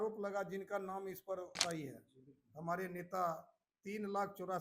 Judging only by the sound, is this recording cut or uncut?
cut